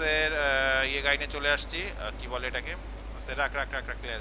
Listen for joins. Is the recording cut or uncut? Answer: uncut